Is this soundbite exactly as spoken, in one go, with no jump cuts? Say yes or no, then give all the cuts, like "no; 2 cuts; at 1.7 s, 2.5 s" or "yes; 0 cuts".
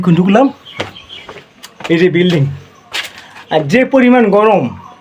yes; 0 cuts